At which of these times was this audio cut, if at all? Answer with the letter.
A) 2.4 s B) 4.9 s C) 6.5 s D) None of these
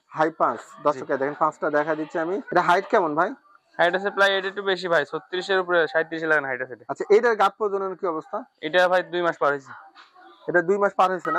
A